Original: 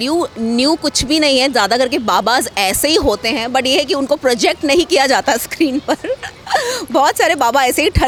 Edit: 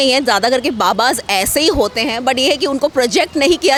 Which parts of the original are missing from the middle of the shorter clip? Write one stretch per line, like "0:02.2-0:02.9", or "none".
none